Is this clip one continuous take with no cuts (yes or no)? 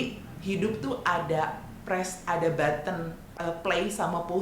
no